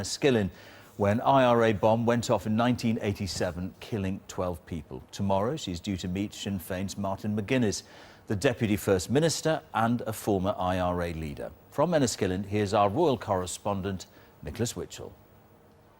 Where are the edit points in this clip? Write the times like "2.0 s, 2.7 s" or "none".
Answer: 11.9 s